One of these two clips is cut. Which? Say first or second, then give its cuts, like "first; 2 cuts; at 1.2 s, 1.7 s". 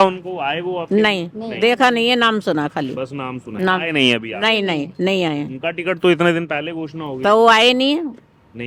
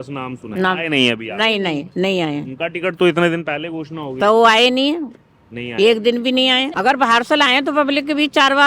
second; 1 cut; at 6.7 s